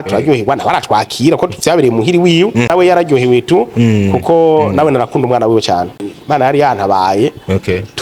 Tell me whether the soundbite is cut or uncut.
cut